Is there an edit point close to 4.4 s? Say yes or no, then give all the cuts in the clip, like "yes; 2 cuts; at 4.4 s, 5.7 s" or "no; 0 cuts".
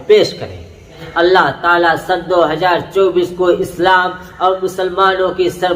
no; 1 cut; at 1.0 s